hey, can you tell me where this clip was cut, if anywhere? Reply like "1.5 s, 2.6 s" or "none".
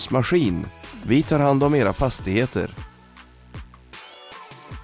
none